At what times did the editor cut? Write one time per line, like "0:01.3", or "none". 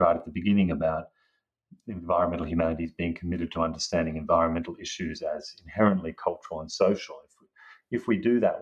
none